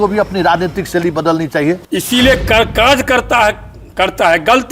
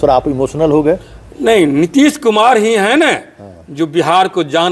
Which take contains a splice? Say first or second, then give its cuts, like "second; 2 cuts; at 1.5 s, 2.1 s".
first; 1 cut; at 1.8 s